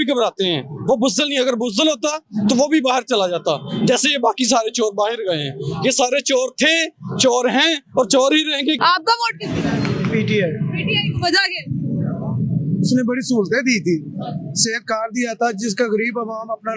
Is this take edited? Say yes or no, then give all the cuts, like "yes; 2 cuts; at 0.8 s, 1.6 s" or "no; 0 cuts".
yes; 1 cut; at 8.8 s